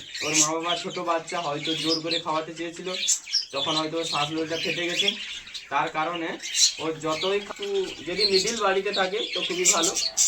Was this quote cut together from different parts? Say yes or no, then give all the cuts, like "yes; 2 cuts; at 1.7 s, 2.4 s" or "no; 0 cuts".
yes; 1 cut; at 7.5 s